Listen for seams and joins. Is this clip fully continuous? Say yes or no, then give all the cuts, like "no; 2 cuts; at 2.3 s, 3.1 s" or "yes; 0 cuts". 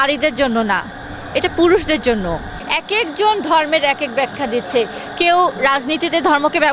no; 1 cut; at 2.6 s